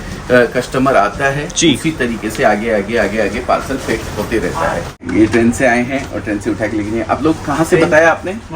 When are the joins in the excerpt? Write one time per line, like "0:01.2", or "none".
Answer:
0:05.0